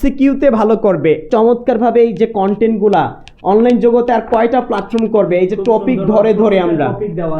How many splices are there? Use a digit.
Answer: 1